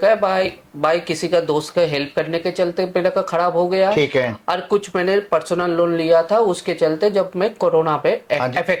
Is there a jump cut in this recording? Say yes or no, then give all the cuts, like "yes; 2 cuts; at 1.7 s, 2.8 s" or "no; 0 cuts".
no; 0 cuts